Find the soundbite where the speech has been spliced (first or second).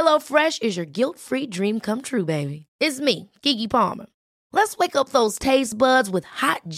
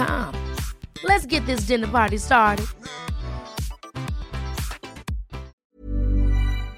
second